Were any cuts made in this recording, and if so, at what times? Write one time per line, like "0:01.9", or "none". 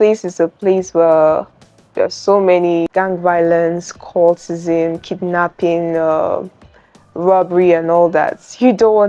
0:02.9